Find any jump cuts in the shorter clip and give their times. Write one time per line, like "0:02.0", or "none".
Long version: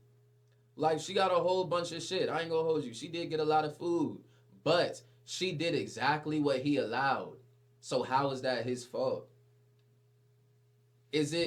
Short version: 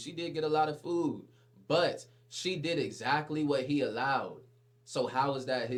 none